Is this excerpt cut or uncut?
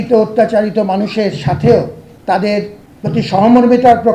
cut